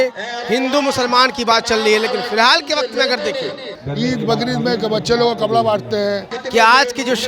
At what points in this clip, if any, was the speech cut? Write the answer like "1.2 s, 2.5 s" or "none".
3.7 s, 6.3 s